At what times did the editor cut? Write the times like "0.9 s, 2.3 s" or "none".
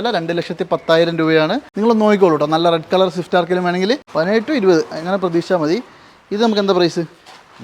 1.7 s, 4.1 s